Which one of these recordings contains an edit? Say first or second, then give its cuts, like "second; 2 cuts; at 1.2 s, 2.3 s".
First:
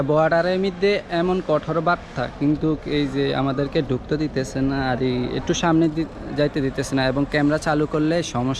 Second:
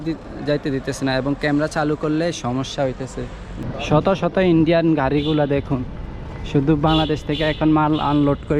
second; 1 cut; at 3.6 s